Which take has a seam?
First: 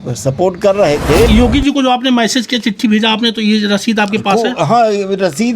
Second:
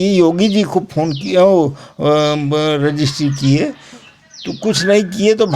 first; 1 cut; at 1.3 s

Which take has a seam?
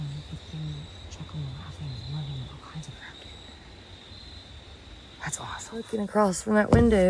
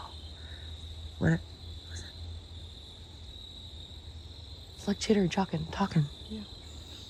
first; 1 cut; at 5.9 s

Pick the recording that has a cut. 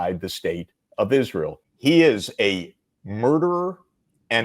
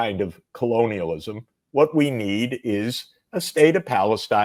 first; 1 cut; at 1.6 s

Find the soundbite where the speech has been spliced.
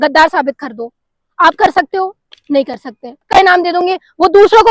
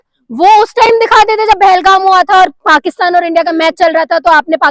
first; 1 cut; at 3.3 s

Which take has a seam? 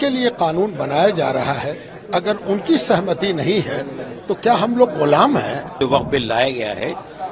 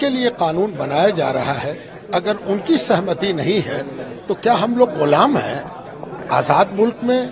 first; 1 cut; at 5.7 s

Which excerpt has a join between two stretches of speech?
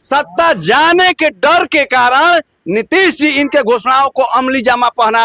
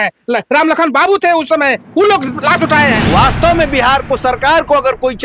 second; 1 cut; at 3.0 s

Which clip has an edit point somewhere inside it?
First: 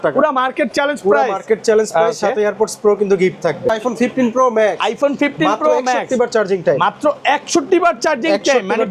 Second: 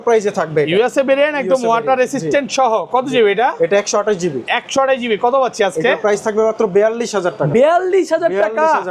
first; 1 cut; at 3.7 s

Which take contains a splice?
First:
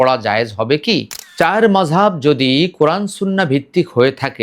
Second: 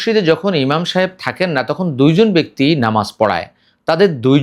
first; 1 cut; at 1.2 s

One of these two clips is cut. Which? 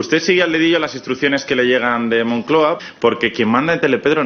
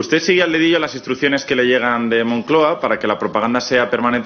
first; 1 cut; at 2.8 s

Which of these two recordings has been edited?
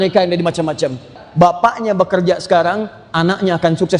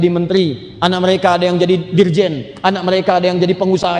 first; 1 cut; at 1.2 s

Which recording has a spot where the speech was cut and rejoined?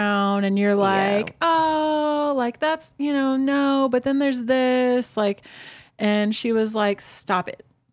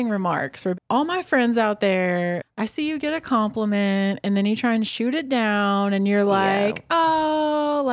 second; 2 cuts; at 0.8 s, 2.5 s

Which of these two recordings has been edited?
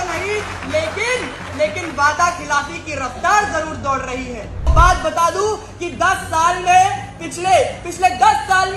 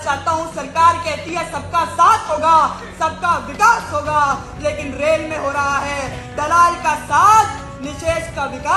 first; 1 cut; at 4.7 s

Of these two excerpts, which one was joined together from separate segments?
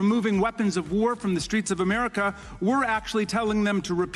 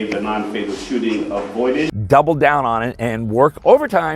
second; 1 cut; at 2.0 s

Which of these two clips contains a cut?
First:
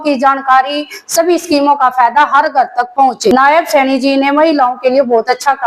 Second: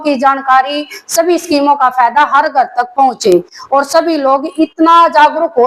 first; 1 cut; at 3.3 s

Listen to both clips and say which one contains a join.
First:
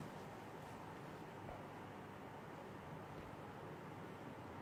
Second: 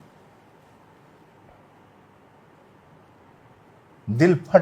second; 1 cut; at 3.1 s

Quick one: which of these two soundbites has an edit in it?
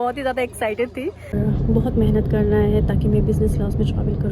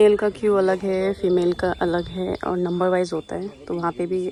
first; 1 cut; at 1.3 s

